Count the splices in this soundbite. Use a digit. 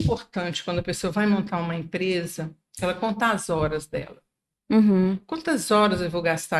0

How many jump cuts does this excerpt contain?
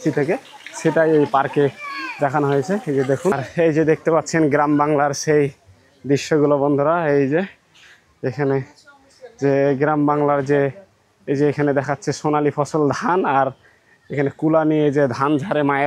1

